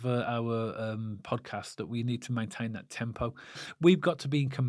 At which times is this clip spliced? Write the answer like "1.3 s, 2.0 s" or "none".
3.7 s